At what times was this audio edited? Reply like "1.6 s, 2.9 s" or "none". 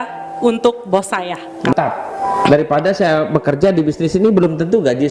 1.7 s